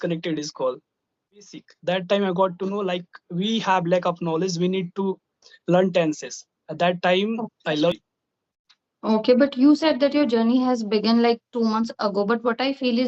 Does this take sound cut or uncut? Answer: cut